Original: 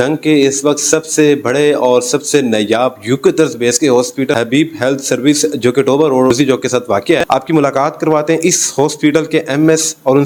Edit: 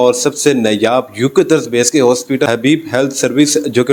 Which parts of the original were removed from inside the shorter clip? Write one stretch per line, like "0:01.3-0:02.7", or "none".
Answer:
none